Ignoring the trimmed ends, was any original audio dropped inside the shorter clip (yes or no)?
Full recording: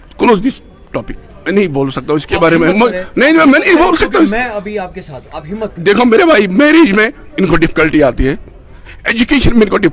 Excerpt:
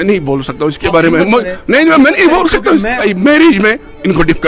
yes